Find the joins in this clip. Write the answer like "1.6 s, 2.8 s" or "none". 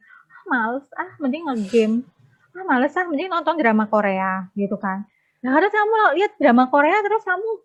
none